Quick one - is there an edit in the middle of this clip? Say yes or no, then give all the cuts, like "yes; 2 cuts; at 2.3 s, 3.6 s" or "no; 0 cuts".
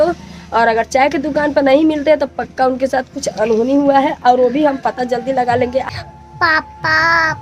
yes; 1 cut; at 6.0 s